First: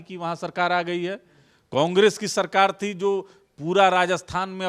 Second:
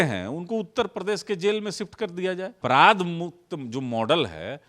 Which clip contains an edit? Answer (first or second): second